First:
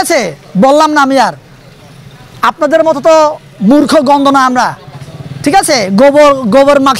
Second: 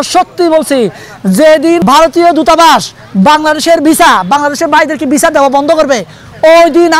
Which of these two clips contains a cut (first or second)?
second